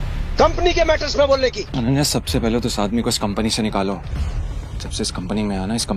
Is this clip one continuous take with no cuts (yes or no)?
yes